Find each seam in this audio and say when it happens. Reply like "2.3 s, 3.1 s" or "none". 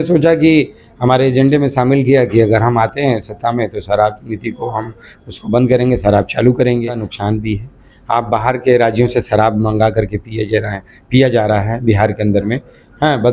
7.1 s